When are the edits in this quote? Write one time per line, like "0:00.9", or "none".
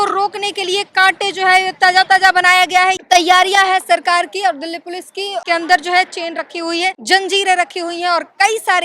0:03.0
0:05.4
0:07.0